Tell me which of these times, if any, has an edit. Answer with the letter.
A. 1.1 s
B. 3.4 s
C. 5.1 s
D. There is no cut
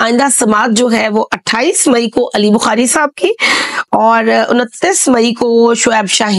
D